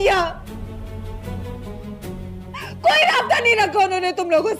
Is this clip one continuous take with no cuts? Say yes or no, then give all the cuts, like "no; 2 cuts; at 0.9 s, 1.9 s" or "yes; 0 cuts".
yes; 0 cuts